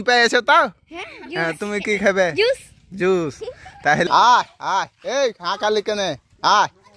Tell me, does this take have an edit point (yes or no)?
yes